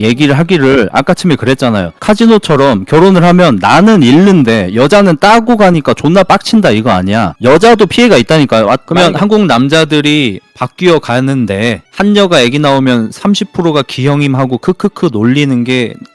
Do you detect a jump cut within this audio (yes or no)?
yes